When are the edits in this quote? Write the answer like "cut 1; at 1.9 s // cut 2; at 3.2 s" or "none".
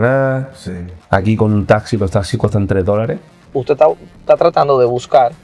cut 1; at 3.4 s